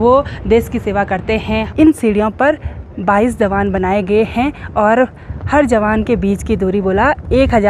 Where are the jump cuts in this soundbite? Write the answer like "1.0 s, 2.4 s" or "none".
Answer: 1.7 s